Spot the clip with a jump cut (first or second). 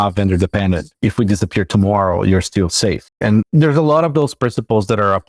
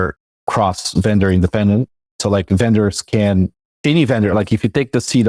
first